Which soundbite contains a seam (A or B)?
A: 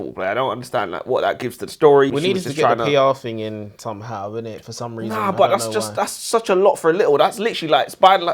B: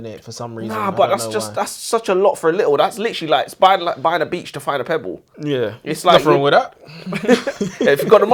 A